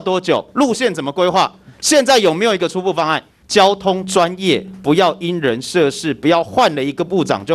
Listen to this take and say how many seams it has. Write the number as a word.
one